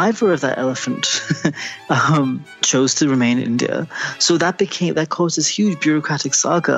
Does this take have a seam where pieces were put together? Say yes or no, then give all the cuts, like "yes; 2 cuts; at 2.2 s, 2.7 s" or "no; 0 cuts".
no; 0 cuts